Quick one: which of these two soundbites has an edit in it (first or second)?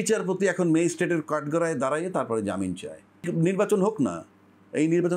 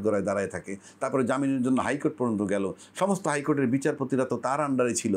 first